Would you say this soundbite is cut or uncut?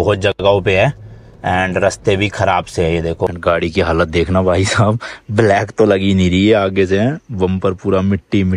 cut